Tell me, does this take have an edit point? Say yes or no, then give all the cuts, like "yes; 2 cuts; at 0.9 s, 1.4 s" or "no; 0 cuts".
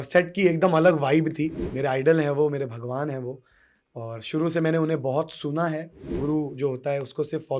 yes; 2 cuts; at 1.6 s, 6.2 s